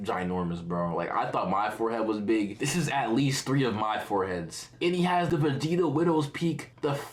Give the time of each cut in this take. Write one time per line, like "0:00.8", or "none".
none